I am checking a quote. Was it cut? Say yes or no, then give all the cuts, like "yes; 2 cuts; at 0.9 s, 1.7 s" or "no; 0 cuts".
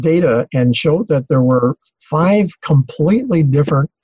no; 0 cuts